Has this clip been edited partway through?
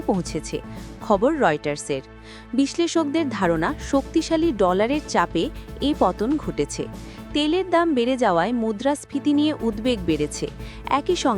no; 0 cuts

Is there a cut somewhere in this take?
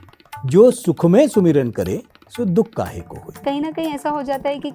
yes; 1 cut; at 3.4 s

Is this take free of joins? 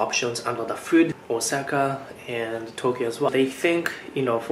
no; 2 cuts; at 1.2 s, 3.3 s

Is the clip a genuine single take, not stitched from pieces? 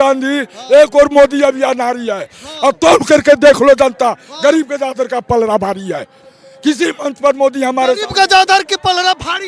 yes; 0 cuts

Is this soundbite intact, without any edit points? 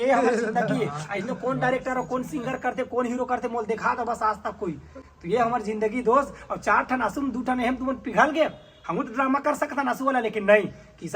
yes; 0 cuts

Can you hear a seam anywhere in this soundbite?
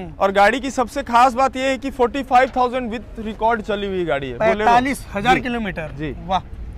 no; 0 cuts

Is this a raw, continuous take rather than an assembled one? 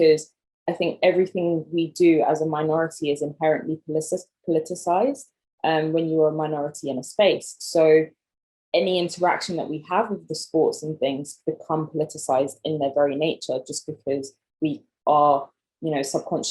yes; 0 cuts

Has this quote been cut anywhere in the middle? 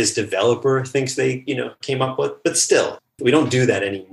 yes; 1 cut; at 3.0 s

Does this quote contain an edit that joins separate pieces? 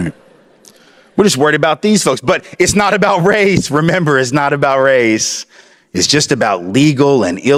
no; 0 cuts

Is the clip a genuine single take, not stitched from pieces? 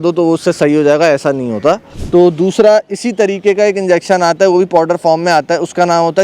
no; 1 cut; at 1.9 s

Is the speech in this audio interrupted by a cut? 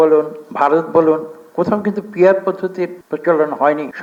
no; 0 cuts

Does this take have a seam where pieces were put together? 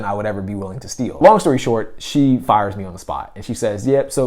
yes; 1 cut; at 1.1 s

